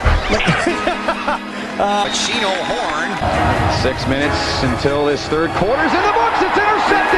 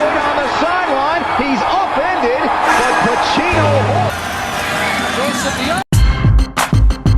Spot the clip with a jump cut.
second; 1 cut; at 4.1 s

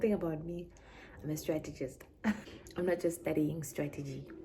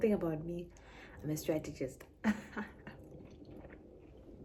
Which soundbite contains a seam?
first; 1 cut; at 2.5 s

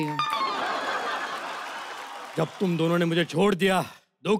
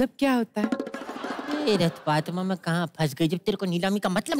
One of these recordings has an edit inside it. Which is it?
first; 1 cut; at 2.1 s

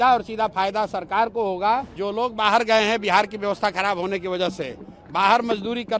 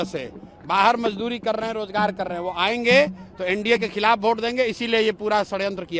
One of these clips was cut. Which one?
first; 1 cut; at 2.0 s

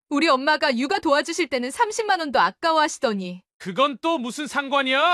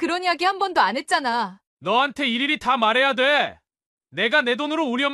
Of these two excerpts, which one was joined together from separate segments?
second; 1 cut; at 1.6 s

